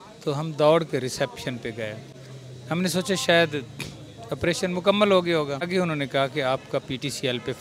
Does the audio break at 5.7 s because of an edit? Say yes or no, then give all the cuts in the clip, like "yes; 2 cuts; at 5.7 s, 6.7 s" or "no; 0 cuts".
yes; 1 cut; at 5.7 s